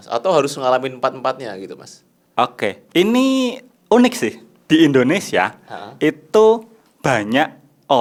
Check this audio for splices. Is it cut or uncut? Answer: uncut